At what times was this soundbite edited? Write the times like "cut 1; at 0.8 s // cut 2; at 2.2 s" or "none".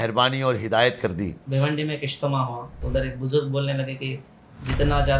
cut 1; at 1.4 s // cut 2; at 2.7 s